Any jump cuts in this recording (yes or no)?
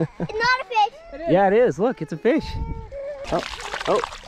yes